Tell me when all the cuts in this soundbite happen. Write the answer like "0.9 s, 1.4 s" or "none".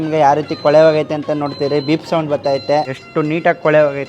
3.0 s